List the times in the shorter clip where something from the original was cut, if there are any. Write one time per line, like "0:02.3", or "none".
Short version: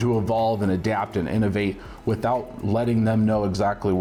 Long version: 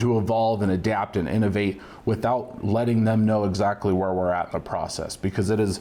none